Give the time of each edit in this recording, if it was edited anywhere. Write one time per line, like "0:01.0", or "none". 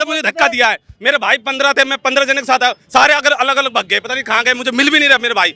none